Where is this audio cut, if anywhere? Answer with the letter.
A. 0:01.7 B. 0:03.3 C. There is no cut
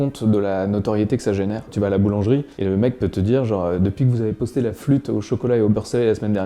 A